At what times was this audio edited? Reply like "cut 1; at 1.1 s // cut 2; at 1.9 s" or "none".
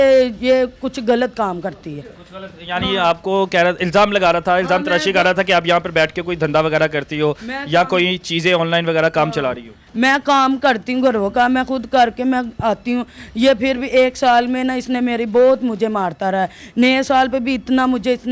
none